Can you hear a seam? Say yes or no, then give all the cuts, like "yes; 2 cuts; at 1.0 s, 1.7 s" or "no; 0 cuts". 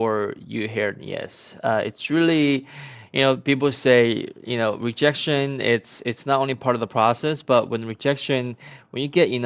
no; 0 cuts